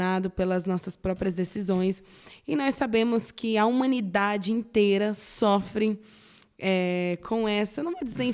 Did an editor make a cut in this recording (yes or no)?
no